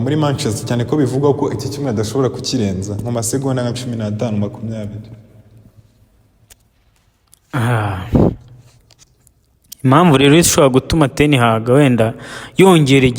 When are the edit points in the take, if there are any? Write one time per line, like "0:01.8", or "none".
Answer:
none